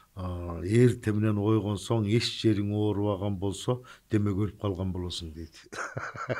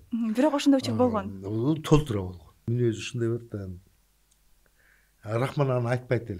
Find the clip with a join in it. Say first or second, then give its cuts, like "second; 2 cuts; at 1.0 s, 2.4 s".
second; 1 cut; at 2.7 s